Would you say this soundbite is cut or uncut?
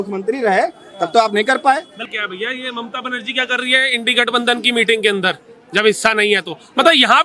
cut